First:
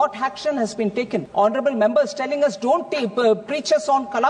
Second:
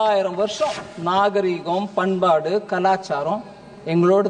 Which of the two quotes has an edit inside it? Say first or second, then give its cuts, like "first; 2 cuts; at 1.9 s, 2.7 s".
first; 1 cut; at 1.3 s